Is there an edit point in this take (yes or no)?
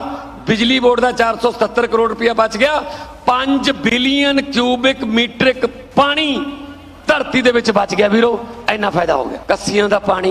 yes